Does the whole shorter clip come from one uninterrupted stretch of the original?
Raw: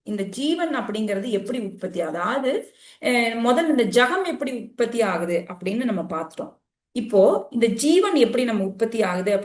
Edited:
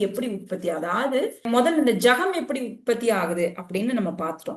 no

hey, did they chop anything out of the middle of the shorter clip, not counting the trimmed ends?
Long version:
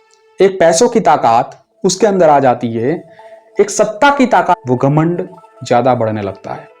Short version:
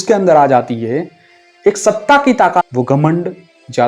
no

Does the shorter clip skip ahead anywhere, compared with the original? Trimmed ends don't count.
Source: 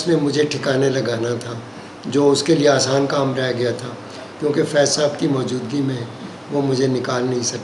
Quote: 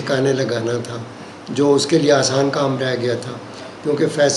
no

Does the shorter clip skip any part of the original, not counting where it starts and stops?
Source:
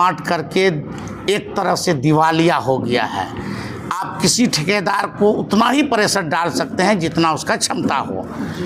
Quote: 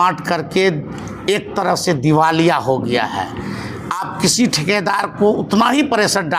no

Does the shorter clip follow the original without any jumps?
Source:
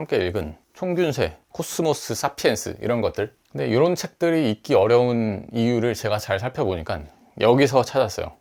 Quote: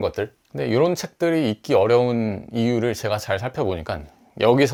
yes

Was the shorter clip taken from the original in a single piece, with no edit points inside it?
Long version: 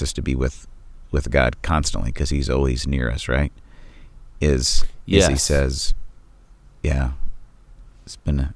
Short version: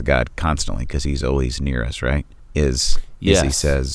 no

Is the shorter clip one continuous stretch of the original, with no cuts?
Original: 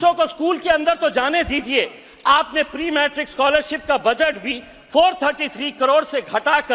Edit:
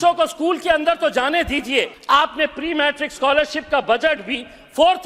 no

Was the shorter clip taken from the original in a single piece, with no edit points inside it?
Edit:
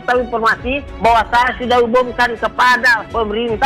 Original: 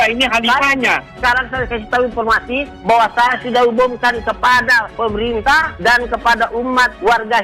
yes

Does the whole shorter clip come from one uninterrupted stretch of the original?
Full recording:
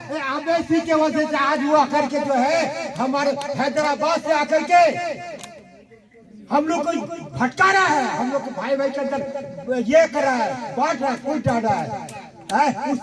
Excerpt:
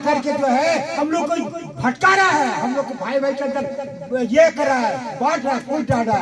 no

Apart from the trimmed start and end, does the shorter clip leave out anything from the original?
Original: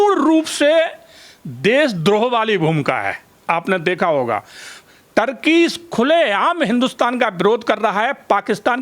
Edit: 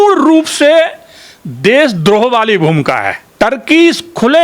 yes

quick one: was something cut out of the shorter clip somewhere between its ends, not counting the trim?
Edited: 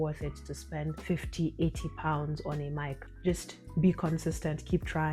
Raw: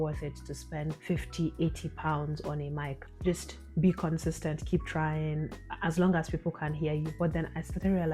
no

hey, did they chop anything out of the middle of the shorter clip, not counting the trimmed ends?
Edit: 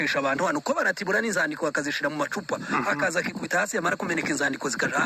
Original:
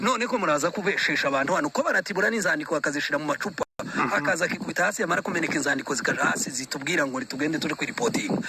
yes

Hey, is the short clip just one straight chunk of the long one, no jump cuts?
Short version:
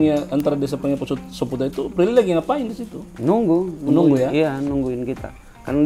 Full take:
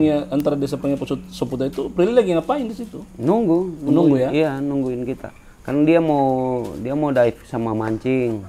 yes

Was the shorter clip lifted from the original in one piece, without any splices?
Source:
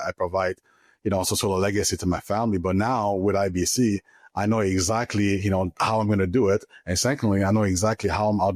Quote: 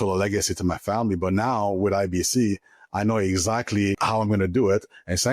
no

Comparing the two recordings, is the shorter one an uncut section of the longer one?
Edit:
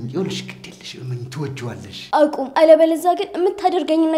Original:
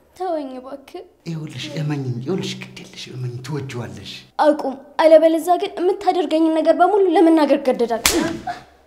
no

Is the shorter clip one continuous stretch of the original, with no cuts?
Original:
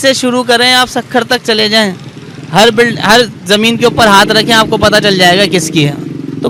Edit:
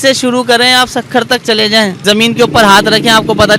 no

